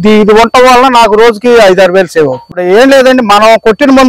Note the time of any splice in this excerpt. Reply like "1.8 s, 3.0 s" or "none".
2.5 s